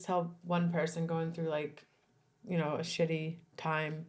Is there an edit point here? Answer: no; 0 cuts

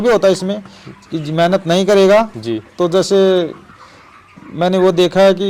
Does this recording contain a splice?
no; 0 cuts

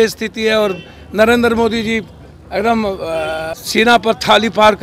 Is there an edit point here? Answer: yes; 1 cut; at 3.5 s

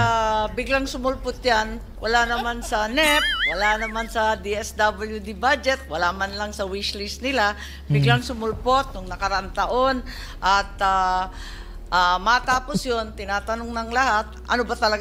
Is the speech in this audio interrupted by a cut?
no; 0 cuts

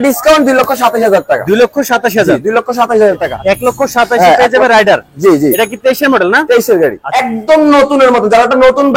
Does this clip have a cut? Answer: yes; 2 cuts; at 3.2 s, 7.1 s

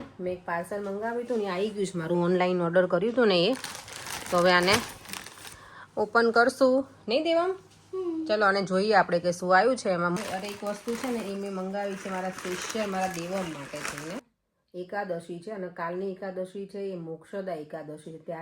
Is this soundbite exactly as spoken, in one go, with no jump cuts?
no; 2 cuts; at 10.1 s, 14.3 s

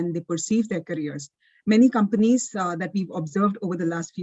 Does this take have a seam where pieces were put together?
no; 0 cuts

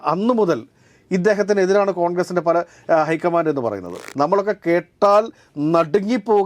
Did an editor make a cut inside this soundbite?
yes; 1 cut; at 4.0 s

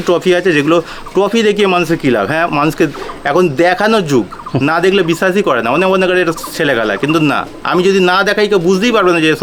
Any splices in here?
no; 0 cuts

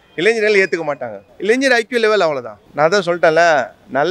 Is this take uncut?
yes; 0 cuts

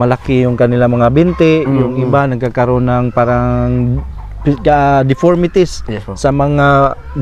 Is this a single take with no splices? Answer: yes; 0 cuts

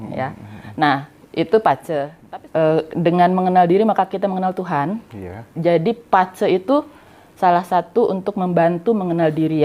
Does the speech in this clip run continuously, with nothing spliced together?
no; 1 cut; at 2.1 s

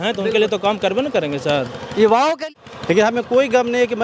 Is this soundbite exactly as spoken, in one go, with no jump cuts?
no; 1 cut; at 2.4 s

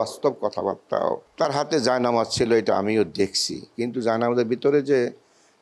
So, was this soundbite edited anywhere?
yes; 1 cut; at 1.3 s

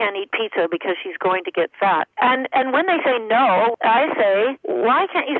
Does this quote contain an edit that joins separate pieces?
yes; 1 cut; at 3.7 s

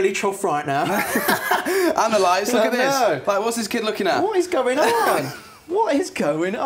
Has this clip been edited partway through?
no; 0 cuts

